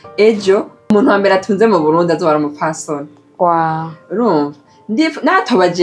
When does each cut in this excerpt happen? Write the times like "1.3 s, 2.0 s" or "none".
0.9 s